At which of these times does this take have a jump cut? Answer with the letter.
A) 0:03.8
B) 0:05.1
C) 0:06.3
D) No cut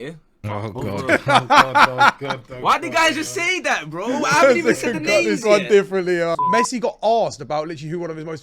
C